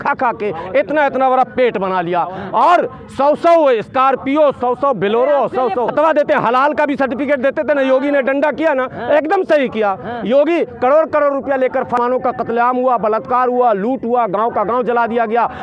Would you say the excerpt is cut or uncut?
cut